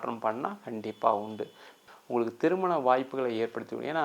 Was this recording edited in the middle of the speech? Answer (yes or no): yes